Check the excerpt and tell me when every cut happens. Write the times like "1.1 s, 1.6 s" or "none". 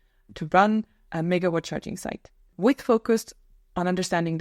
2.5 s